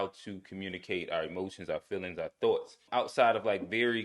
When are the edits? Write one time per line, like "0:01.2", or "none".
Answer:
0:02.8